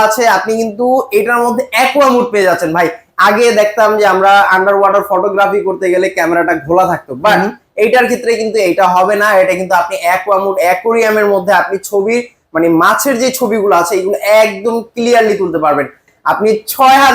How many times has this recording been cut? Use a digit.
1